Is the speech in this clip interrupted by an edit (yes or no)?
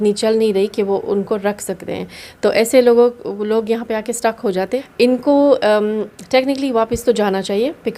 yes